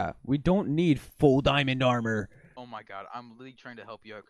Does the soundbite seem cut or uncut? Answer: cut